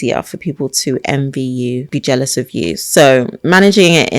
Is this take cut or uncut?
cut